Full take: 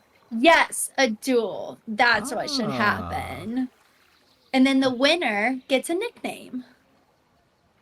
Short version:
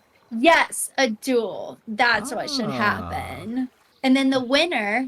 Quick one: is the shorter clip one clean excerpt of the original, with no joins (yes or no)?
no